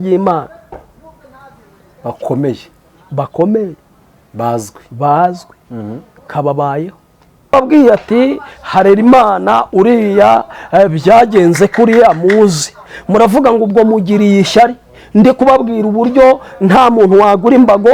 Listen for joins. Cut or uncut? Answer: cut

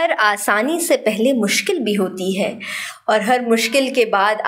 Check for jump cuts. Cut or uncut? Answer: uncut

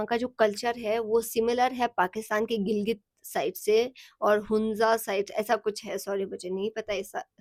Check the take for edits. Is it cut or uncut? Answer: uncut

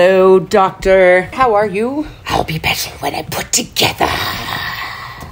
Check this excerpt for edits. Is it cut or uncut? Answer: cut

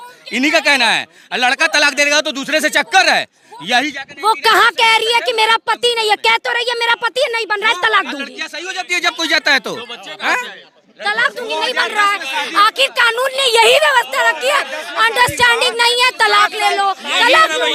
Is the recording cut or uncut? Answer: uncut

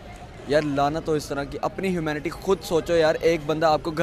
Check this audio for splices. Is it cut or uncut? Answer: uncut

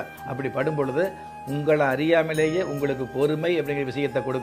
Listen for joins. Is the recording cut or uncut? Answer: uncut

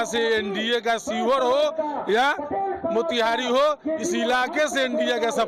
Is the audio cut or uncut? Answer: uncut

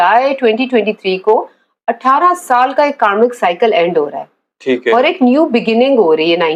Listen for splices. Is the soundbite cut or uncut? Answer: uncut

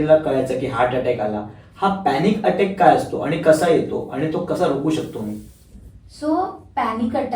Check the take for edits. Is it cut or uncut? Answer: uncut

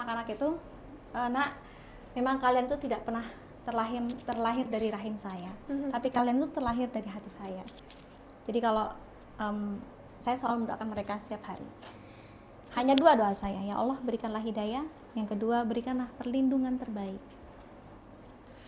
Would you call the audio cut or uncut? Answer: uncut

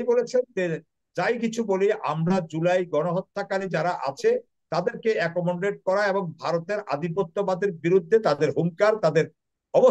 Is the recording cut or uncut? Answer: uncut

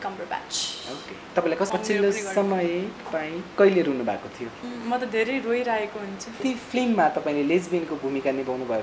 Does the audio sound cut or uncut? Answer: cut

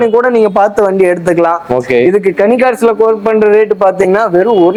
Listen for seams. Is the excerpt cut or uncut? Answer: uncut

